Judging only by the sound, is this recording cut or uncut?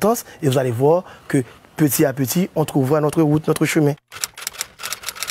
cut